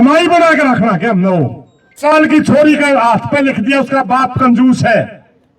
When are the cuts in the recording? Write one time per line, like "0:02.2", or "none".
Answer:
0:02.0